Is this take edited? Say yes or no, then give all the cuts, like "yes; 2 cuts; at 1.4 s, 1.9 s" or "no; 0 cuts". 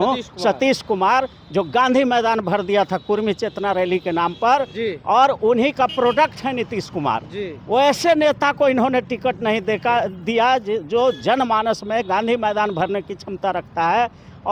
no; 0 cuts